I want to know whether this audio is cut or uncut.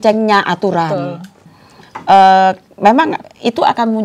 cut